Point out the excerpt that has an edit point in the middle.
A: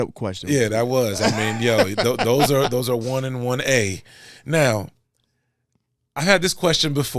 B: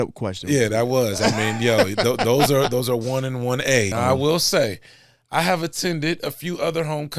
B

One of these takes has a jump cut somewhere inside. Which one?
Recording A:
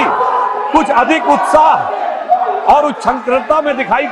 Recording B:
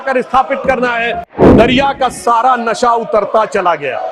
B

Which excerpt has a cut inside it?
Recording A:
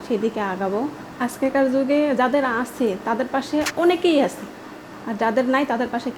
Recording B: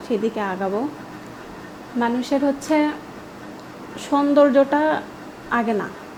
A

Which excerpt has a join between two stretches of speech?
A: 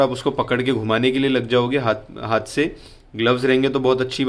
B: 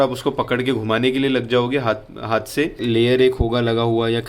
B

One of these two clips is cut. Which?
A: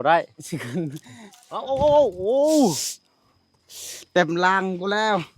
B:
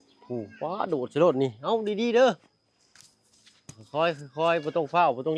A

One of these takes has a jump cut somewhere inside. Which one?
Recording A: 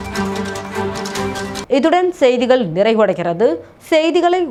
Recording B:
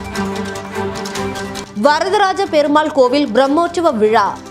B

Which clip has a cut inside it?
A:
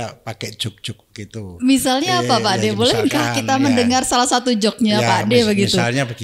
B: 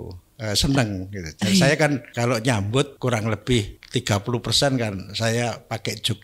B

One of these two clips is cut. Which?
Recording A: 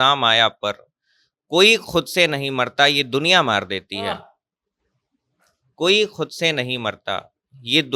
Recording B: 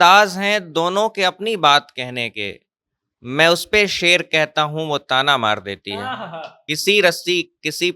B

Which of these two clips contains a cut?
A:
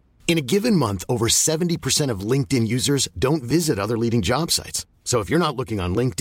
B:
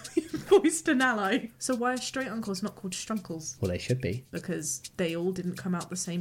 B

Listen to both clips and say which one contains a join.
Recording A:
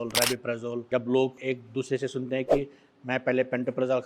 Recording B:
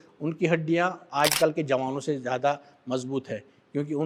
A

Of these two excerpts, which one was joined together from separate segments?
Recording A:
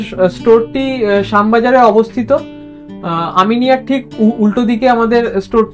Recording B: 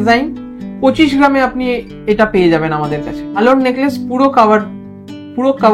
B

